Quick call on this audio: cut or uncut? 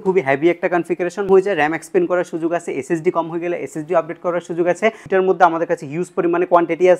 cut